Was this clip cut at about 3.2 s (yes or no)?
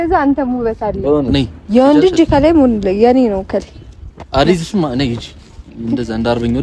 no